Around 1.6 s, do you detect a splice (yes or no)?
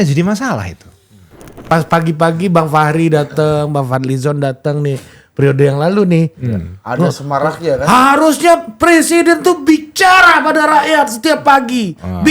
yes